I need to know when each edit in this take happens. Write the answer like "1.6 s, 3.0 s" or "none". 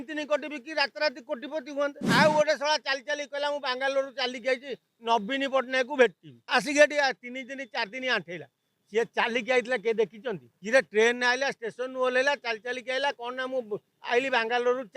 2.0 s